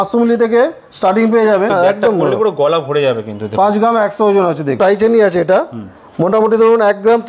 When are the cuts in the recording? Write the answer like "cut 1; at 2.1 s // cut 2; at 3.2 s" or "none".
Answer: cut 1; at 1.7 s // cut 2; at 4.8 s